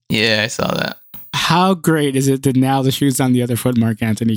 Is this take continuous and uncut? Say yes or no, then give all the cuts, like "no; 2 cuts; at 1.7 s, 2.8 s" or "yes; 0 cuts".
no; 1 cut; at 1.0 s